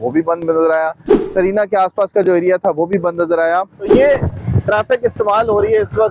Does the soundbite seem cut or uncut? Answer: cut